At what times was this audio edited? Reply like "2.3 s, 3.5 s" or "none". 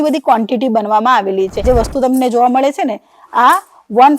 1.6 s